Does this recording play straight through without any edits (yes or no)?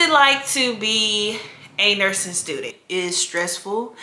no